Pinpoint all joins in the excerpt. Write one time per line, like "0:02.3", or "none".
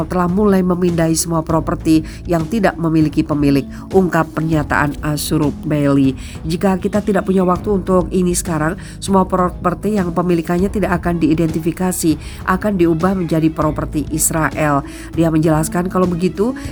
none